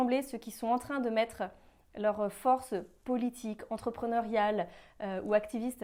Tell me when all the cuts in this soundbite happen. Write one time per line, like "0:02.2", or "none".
none